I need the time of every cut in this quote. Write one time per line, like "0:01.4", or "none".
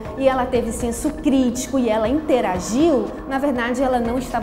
none

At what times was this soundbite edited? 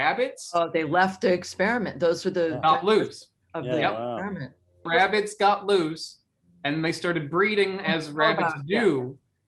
0:04.9

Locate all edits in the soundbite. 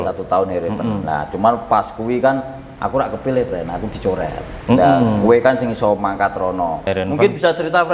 0:06.9

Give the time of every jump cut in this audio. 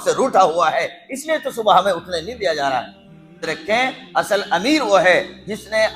0:03.4

